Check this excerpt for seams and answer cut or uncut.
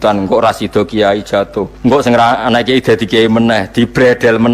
cut